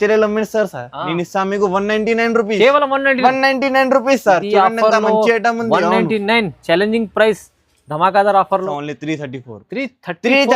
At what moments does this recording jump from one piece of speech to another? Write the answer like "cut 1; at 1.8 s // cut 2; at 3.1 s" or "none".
cut 1; at 8.6 s

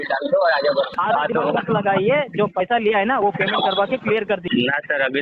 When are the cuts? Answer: cut 1; at 0.9 s // cut 2; at 4.4 s

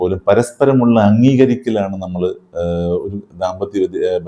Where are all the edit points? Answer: none

